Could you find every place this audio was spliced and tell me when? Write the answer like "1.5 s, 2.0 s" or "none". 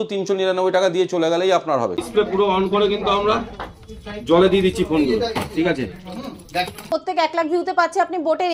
2.0 s, 6.9 s